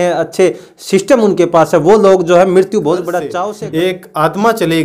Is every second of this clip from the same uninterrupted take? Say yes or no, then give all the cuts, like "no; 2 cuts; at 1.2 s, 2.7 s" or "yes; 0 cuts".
no; 1 cut; at 3.3 s